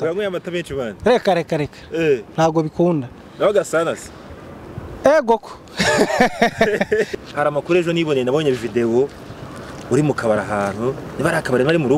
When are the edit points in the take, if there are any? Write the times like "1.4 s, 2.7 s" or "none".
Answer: 7.2 s